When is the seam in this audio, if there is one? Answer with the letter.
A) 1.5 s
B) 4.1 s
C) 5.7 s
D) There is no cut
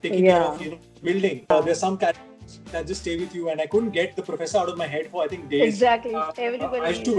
A